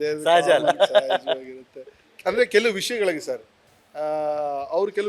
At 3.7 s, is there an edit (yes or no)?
no